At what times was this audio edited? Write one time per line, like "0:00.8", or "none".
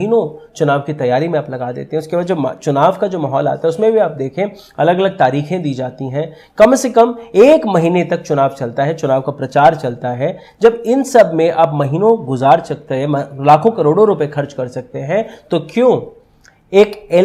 none